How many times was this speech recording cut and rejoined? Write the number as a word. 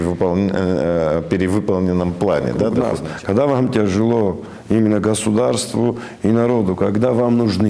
one